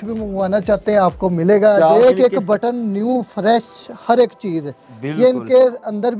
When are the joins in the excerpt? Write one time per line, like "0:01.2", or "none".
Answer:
0:02.0

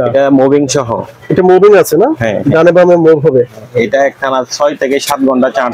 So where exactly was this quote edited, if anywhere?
none

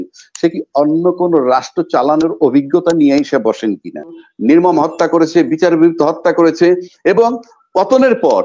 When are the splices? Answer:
0:04.3

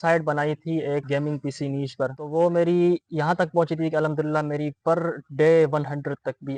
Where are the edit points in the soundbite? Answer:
none

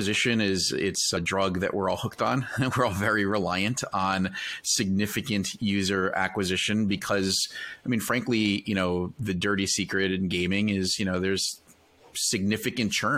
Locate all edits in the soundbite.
0:01.2

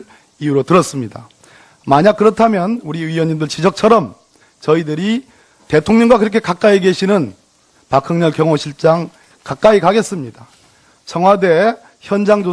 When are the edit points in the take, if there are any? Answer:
0:09.8

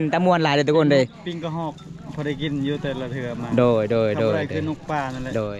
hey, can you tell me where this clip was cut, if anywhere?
none

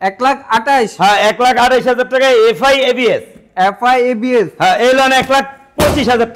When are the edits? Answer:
none

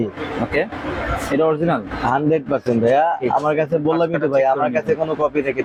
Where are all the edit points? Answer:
none

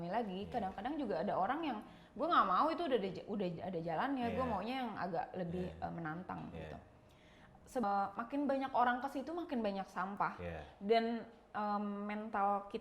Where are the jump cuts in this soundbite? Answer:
0:07.8

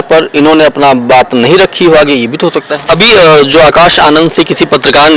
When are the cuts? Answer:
0:02.7

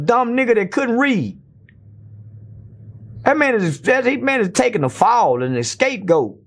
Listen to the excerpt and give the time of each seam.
none

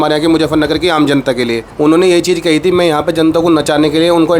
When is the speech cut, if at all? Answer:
0:01.6

